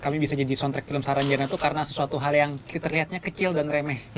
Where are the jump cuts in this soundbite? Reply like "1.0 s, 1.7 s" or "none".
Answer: none